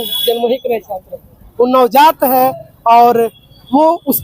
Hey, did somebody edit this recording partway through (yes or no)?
yes